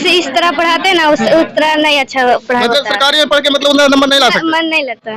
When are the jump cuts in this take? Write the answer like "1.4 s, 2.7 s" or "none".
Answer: none